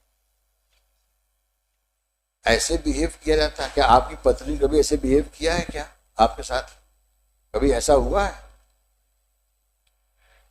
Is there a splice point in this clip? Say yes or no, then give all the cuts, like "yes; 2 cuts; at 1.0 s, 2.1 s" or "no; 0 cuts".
no; 0 cuts